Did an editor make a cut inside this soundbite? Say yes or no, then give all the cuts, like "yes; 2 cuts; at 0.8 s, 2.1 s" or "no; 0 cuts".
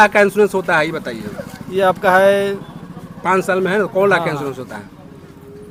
no; 0 cuts